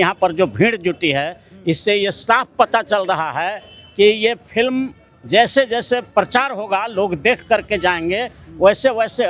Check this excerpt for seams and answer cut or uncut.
uncut